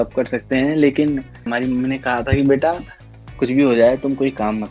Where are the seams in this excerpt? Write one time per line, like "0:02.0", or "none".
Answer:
0:01.4